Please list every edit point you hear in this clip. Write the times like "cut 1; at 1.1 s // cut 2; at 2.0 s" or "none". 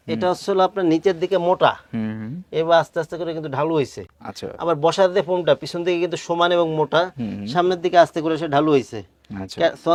none